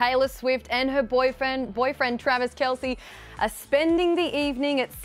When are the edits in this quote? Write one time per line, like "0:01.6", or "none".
none